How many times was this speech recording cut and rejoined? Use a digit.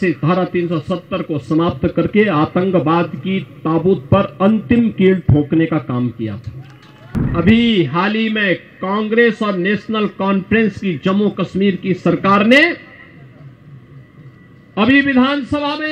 1